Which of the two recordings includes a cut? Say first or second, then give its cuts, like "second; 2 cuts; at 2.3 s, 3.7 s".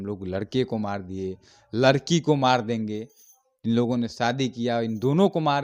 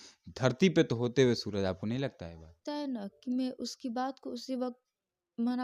second; 1 cut; at 2.5 s